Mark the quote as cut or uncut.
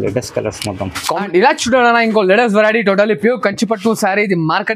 cut